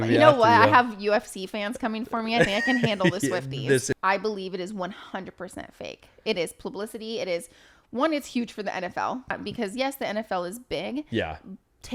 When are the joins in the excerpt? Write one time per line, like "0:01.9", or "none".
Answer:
0:03.9
0:09.4